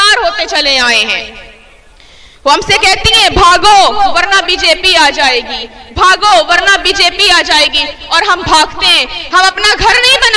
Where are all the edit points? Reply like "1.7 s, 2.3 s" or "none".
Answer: none